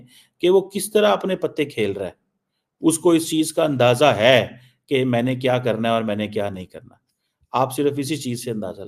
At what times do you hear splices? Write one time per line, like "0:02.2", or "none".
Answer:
0:07.8